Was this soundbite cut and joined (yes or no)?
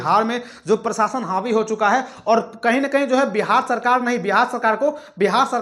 no